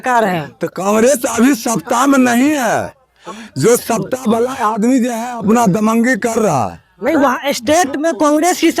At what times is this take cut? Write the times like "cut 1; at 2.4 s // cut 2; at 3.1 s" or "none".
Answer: none